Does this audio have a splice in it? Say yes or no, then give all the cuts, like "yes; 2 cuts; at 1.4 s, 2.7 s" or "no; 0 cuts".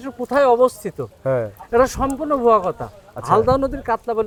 no; 0 cuts